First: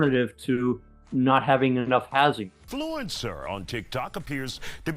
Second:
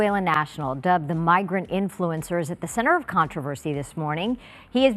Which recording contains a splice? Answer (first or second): first